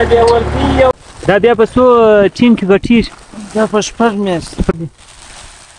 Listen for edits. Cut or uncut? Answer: cut